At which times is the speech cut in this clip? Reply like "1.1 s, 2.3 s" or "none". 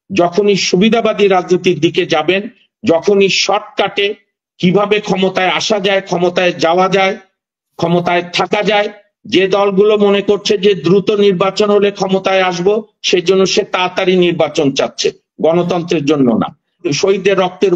16.8 s